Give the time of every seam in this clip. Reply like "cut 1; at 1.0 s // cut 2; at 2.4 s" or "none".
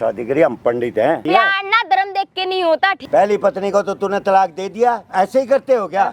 cut 1; at 1.2 s // cut 2; at 3.0 s // cut 3; at 5.0 s